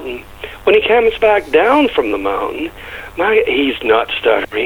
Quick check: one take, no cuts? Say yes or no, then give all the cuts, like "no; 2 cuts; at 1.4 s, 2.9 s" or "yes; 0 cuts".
yes; 0 cuts